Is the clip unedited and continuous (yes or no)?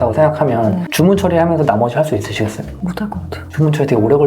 no